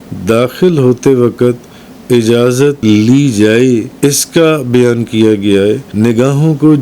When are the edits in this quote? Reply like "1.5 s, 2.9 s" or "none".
2.8 s, 3.9 s, 5.9 s